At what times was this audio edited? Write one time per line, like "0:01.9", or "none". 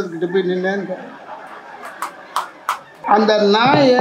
0:02.9